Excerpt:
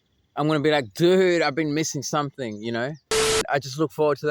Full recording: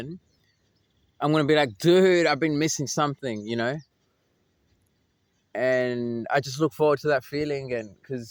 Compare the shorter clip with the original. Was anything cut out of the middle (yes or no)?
yes